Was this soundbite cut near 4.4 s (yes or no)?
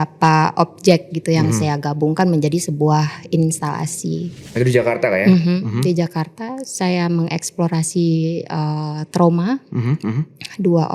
yes